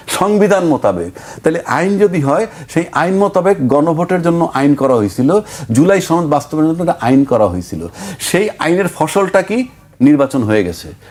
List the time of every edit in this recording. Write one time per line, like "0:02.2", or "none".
none